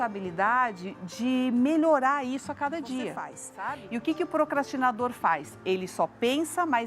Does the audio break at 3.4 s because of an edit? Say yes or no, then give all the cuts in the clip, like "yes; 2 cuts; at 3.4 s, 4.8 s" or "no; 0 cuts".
yes; 1 cut; at 3.4 s